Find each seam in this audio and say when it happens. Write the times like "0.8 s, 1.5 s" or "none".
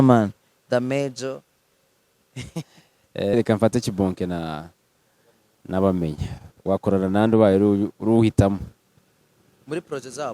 3.3 s